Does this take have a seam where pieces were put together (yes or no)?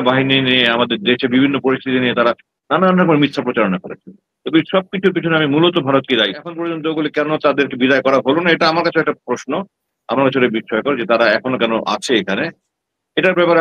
yes